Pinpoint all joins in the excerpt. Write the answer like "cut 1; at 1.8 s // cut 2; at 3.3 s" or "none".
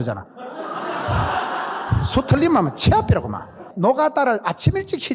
cut 1; at 3.7 s